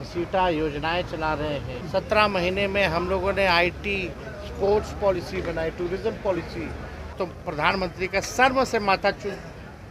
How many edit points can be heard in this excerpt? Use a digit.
2